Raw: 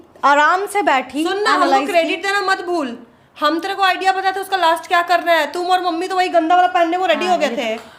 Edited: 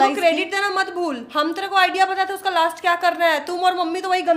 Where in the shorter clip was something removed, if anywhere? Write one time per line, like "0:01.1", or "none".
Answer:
0:01.2